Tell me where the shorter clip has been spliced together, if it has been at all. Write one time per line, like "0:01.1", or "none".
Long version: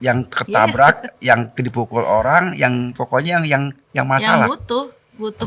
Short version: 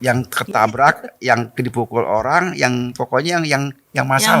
none